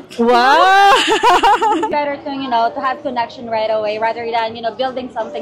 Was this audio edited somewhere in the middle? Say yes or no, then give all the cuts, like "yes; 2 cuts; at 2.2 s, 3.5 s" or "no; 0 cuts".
yes; 1 cut; at 1.9 s